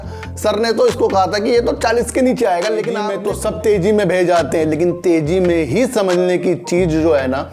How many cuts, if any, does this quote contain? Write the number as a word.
one